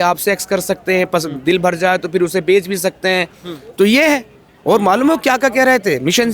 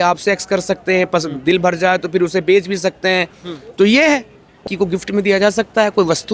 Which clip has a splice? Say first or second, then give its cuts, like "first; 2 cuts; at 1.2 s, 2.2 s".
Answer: second; 1 cut; at 4.6 s